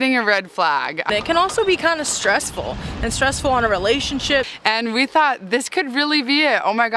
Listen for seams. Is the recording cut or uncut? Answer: cut